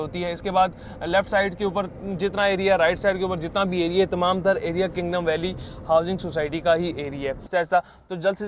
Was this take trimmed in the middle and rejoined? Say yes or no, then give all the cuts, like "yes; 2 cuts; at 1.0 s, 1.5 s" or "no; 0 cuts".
yes; 1 cut; at 7.5 s